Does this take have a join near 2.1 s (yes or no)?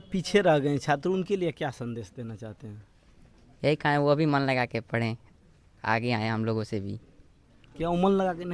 no